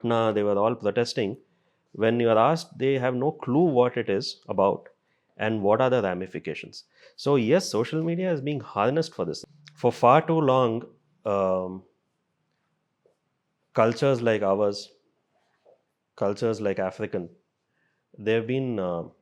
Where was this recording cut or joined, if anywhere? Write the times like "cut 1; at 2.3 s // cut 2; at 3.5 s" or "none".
cut 1; at 9.4 s

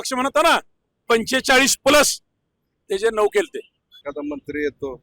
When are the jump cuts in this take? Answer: cut 1; at 4.1 s

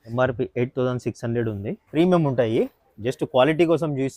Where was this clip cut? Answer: cut 1; at 1.8 s

